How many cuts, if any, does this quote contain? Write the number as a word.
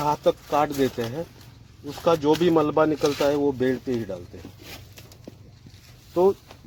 zero